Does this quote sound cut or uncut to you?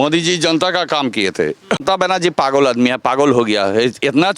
cut